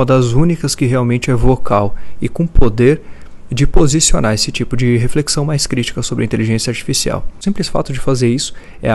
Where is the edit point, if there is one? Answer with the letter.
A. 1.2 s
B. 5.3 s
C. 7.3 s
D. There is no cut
C